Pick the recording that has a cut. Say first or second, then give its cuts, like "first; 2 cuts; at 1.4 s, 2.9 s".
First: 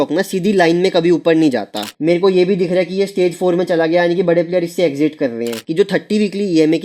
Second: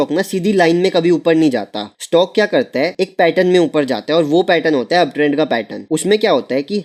first; 2 cuts; at 1.9 s, 5.6 s